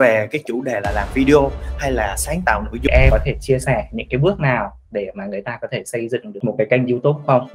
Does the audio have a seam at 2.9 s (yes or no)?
yes